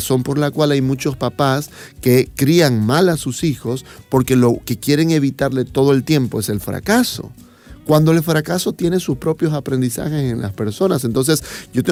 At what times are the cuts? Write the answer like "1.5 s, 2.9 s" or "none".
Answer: none